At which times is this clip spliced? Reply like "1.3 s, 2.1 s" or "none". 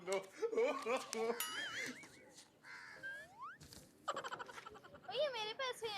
1.4 s